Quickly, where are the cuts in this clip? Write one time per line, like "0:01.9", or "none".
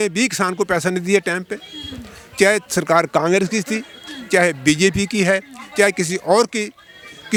none